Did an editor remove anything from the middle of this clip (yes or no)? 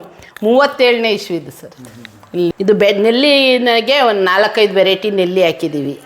yes